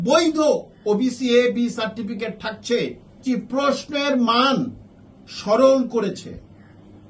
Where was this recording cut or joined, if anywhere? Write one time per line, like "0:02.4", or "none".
0:03.2

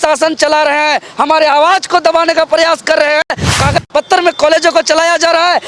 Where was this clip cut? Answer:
0:03.4

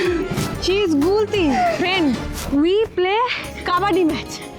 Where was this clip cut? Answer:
none

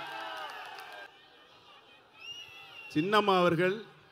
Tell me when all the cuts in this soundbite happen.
0:01.1

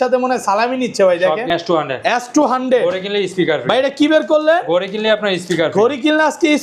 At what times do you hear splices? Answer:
0:01.5

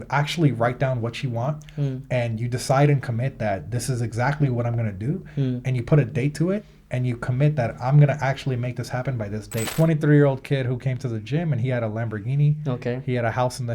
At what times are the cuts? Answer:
0:09.7

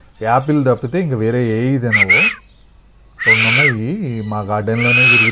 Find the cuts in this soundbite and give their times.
none

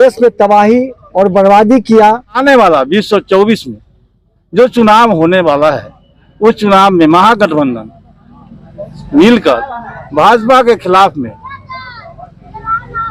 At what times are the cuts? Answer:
0:02.4

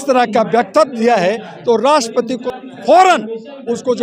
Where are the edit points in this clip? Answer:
0:02.4

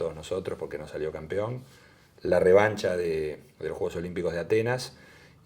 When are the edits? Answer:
none

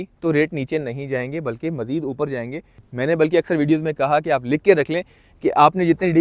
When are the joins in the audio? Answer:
0:02.7

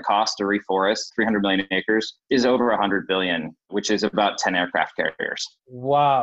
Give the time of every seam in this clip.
0:01.1
0:02.2
0:03.5

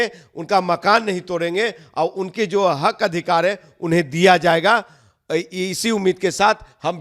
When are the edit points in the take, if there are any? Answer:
none

